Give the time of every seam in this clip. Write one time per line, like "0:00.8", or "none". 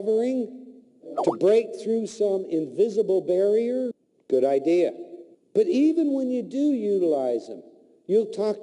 0:01.4